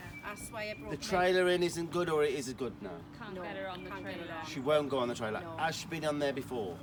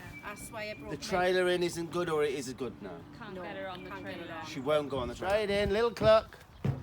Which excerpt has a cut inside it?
second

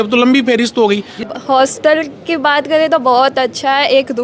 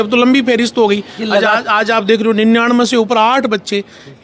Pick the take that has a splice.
first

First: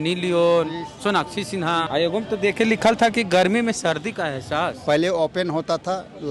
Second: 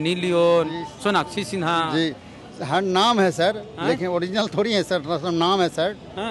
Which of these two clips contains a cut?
first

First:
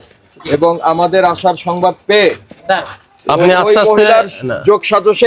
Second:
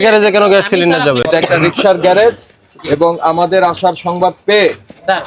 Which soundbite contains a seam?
second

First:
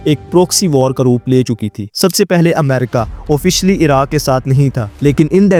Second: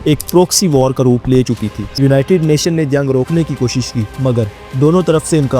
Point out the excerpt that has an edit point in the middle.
second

